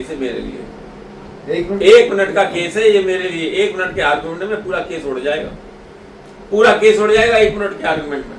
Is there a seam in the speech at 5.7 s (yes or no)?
no